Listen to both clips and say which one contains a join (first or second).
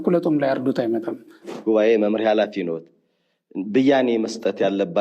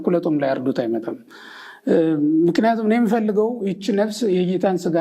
first